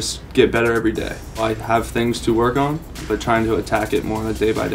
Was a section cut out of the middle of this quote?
yes; 2 cuts; at 1.4 s, 2.9 s

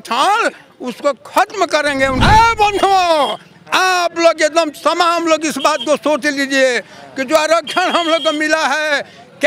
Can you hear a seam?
yes; 1 cut; at 2.2 s

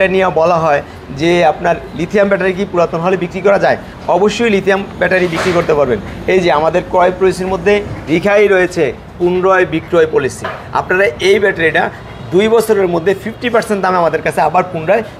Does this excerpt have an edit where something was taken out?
no; 0 cuts

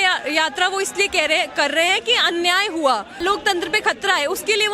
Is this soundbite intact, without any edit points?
no; 1 cut; at 3.1 s

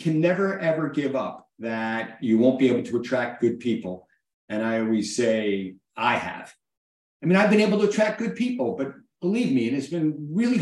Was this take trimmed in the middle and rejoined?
no; 0 cuts

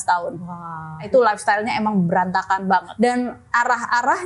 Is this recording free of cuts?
no; 2 cuts; at 1.1 s, 2.9 s

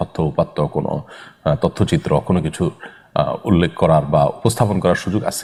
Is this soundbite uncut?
yes; 0 cuts

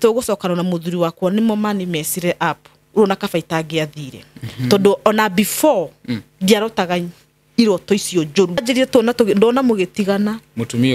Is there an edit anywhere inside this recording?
yes; 1 cut; at 8.6 s

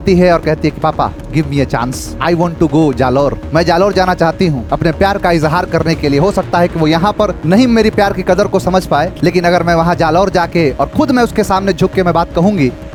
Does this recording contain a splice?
no; 0 cuts

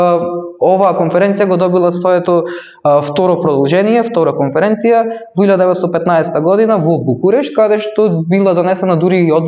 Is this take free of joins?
yes; 0 cuts

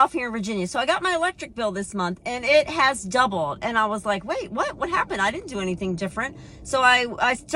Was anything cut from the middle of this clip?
no; 0 cuts

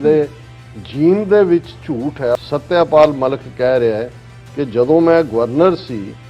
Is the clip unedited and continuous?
no; 1 cut; at 2.4 s

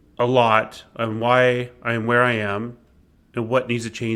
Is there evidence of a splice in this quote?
no; 0 cuts

